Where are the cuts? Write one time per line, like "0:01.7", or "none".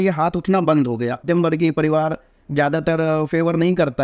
0:01.2